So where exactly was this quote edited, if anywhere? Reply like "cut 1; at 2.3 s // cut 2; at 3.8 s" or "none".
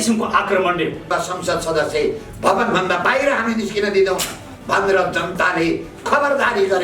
cut 1; at 1.1 s